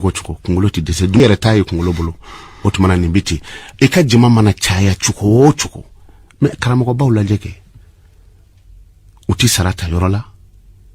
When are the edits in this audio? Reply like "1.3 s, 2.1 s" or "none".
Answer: 1.2 s

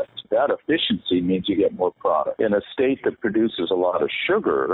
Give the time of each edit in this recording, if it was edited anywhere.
2.3 s

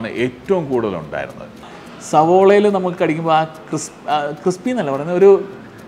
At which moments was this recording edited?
1.7 s

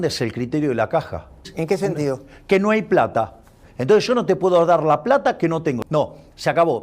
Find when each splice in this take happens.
1.5 s, 5.8 s

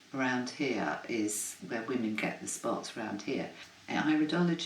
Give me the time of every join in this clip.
1.6 s, 3.7 s

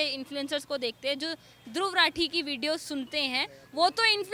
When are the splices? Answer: none

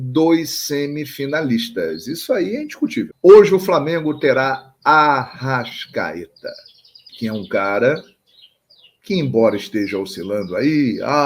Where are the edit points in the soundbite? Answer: 3.1 s

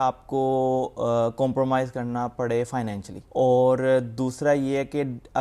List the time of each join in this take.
3.1 s

